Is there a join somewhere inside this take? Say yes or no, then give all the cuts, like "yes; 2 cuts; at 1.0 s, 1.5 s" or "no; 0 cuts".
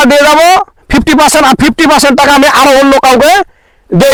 no; 0 cuts